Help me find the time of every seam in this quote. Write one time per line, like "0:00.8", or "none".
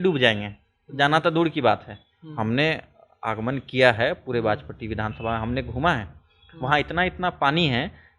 none